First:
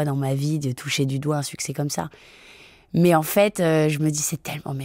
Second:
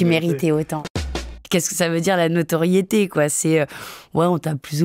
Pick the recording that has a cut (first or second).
second